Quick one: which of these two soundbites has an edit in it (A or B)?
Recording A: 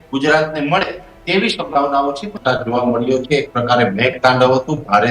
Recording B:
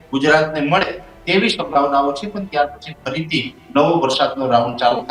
A